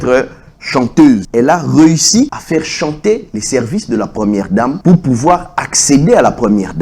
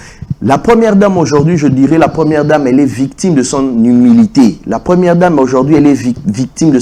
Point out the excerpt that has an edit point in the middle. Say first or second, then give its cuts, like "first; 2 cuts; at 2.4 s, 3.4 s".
first; 3 cuts; at 1.3 s, 2.4 s, 4.8 s